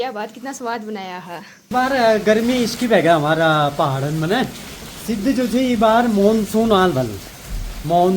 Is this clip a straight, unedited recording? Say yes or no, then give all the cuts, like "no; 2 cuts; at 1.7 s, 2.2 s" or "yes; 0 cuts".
no; 1 cut; at 1.7 s